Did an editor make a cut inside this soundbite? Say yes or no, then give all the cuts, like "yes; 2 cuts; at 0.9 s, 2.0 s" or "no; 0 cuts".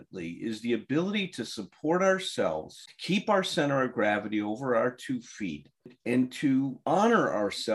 no; 0 cuts